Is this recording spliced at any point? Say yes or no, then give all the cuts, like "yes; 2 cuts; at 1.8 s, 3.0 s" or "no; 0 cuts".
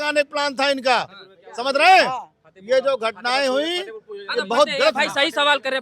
no; 0 cuts